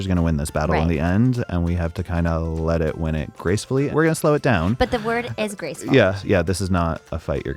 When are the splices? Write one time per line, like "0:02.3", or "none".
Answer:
0:03.9
0:06.2